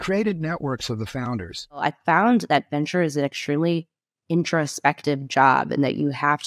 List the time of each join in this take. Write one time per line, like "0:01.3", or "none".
0:01.8